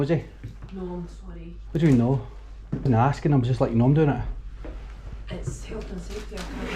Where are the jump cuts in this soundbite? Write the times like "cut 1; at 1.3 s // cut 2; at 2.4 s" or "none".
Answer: cut 1; at 2.9 s